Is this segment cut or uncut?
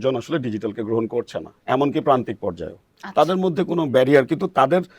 uncut